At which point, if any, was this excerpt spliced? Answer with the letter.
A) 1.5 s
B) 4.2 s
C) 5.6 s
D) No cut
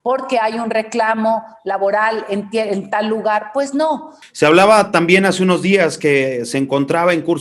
B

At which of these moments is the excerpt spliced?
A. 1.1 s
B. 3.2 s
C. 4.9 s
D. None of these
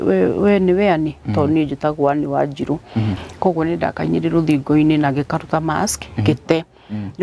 B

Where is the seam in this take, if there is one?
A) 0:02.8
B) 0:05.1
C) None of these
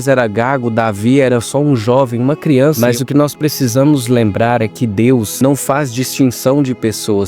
A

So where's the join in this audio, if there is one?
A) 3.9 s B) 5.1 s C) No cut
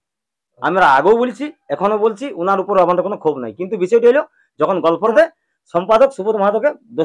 B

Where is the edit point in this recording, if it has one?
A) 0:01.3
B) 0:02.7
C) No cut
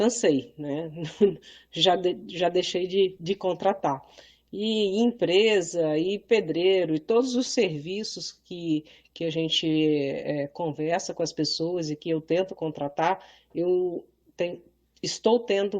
B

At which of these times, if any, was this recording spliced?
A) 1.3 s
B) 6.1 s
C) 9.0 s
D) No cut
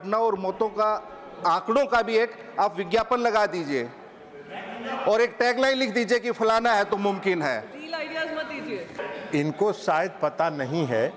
C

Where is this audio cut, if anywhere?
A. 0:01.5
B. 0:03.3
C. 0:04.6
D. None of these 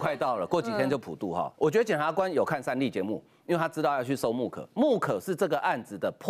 A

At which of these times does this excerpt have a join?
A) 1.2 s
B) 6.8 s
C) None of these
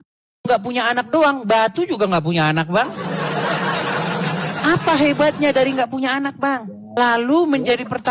B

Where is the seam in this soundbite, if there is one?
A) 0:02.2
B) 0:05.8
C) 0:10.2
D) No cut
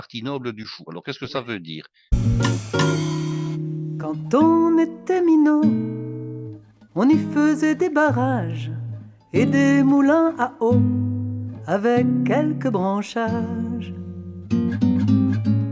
A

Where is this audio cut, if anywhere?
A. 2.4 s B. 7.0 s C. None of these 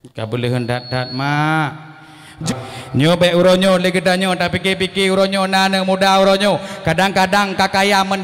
A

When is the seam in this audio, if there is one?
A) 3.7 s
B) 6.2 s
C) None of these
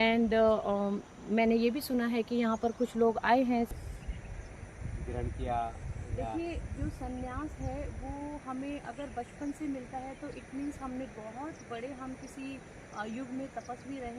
A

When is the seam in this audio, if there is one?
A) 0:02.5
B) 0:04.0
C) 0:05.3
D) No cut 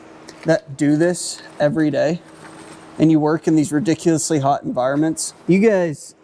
C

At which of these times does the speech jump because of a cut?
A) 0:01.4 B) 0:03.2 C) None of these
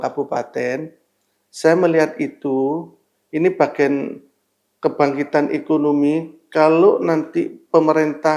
C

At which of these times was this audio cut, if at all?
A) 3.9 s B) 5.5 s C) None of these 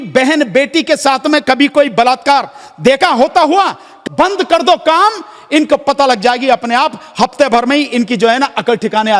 A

